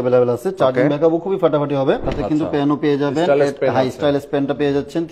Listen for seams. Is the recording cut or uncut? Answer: cut